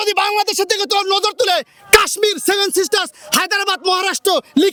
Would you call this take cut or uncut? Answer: uncut